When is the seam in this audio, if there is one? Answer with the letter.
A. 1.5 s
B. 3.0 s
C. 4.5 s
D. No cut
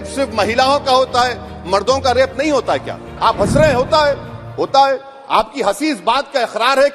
B